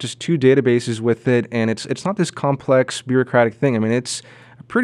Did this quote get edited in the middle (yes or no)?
no